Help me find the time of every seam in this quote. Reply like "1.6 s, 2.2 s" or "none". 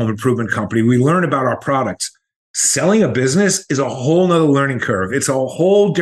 none